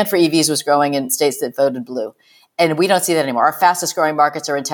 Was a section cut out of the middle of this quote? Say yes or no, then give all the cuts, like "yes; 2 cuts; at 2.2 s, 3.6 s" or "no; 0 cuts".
yes; 1 cut; at 1.1 s